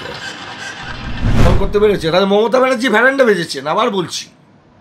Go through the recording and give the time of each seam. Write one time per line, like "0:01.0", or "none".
0:01.4